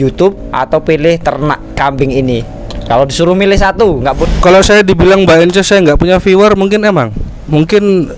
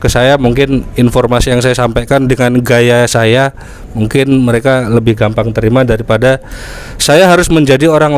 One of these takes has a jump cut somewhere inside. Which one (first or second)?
first